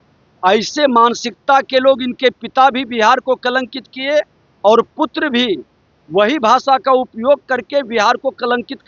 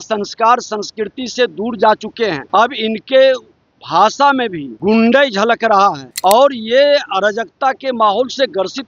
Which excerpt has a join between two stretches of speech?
second; 3 cuts; at 2.4 s, 4.7 s, 6.1 s

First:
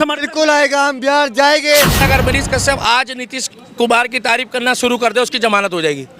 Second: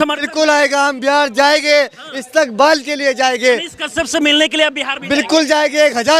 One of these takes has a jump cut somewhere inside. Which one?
first; 1 cut; at 2.0 s

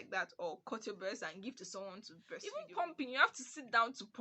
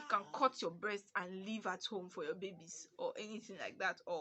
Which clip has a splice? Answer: first; 1 cut; at 2.5 s

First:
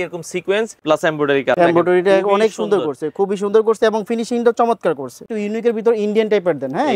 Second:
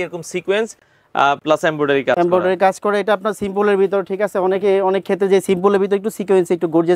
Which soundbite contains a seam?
first; 2 cuts; at 1.2 s, 5.2 s

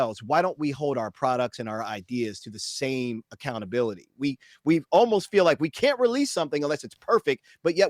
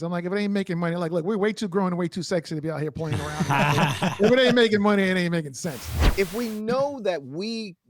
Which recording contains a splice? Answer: second; 1 cut; at 6.0 s

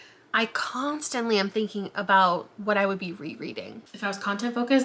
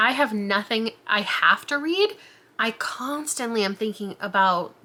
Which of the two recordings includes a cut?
first; 1 cut; at 3.8 s

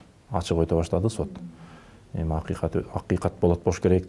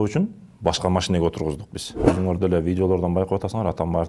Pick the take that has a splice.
second; 1 cut; at 1.9 s

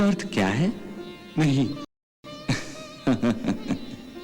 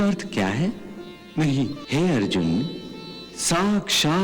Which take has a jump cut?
second; 1 cut; at 1.8 s

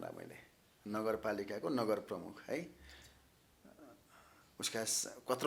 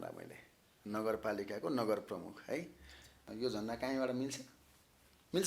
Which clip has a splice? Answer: second; 1 cut; at 3.2 s

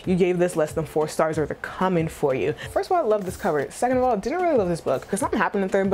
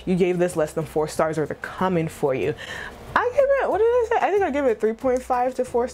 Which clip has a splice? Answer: first; 2 cuts; at 2.7 s, 5.1 s

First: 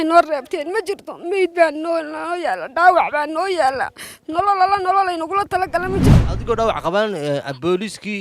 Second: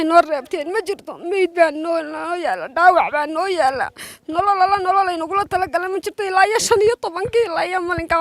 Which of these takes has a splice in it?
first; 1 cut; at 6.1 s

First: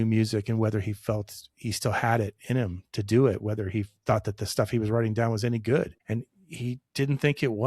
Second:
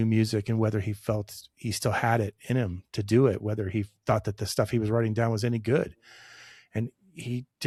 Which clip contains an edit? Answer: first; 1 cut; at 6.0 s

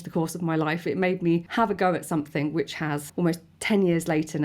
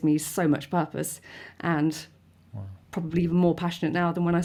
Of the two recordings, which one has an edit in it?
first; 2 cuts; at 1.5 s, 3.1 s

